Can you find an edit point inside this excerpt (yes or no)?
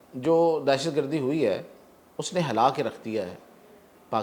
no